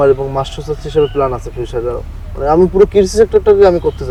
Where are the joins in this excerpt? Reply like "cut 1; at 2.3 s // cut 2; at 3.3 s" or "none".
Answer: none